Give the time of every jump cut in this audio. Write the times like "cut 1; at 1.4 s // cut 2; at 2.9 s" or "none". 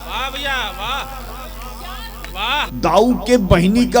cut 1; at 2.6 s

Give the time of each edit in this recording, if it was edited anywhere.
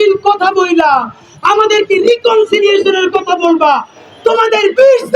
none

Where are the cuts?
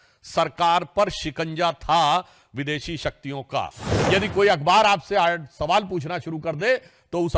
cut 1; at 3.9 s

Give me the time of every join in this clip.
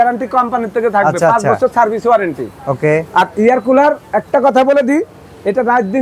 none

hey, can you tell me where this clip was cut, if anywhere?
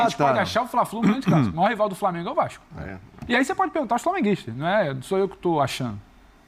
none

